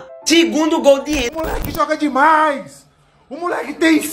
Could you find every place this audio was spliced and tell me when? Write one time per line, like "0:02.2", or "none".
0:01.3